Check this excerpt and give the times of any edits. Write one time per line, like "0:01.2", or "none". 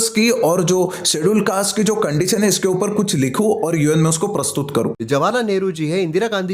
0:05.0